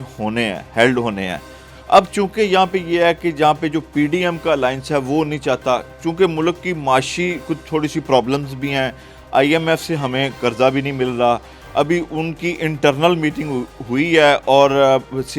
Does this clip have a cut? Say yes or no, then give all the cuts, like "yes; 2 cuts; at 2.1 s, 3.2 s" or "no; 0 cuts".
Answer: no; 0 cuts